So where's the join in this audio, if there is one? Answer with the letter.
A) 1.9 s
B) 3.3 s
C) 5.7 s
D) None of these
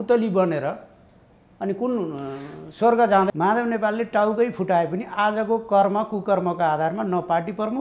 B